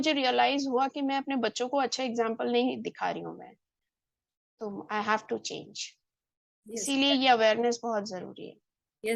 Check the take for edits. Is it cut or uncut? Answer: uncut